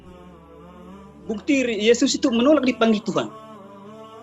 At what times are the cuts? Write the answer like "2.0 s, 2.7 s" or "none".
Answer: 3.3 s